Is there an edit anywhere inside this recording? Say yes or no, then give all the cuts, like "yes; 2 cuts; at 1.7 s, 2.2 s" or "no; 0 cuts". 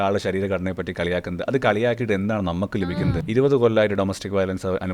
yes; 1 cut; at 3.2 s